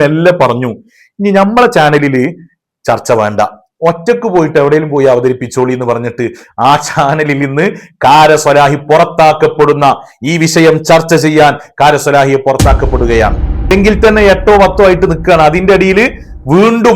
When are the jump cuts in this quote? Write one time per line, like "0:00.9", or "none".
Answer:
0:13.7